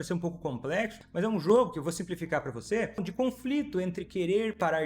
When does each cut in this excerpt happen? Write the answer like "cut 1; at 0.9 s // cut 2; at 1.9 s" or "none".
cut 1; at 1.0 s // cut 2; at 3.1 s